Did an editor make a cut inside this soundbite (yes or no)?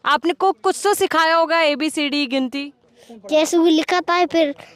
no